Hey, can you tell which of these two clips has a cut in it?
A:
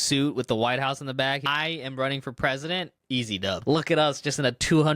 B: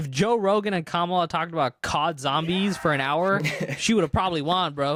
A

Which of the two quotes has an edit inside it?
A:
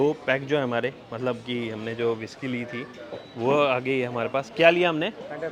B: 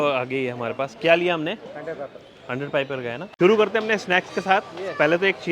B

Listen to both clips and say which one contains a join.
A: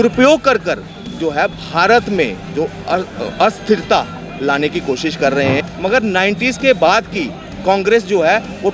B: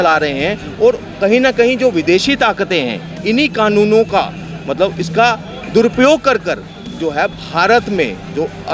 A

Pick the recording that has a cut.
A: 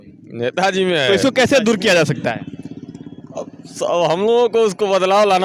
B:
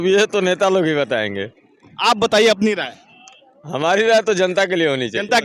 A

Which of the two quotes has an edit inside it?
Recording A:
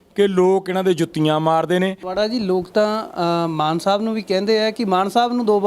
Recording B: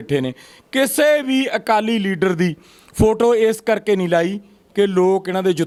A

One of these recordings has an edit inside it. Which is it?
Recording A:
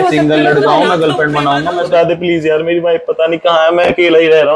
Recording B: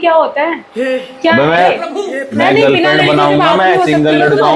A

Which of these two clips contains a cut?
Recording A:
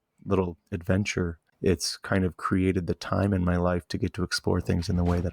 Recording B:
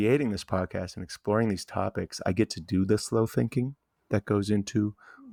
A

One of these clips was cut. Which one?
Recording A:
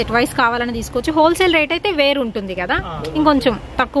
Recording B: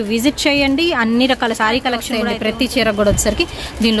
B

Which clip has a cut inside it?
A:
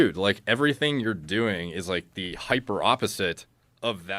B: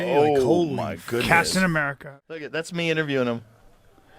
B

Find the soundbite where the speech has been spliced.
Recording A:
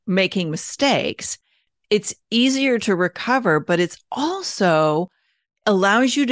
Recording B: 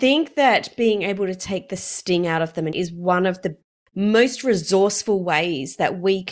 B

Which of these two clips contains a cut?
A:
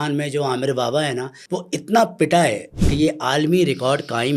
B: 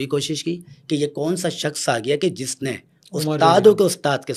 A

